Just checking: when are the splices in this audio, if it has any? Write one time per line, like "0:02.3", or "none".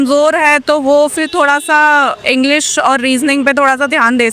none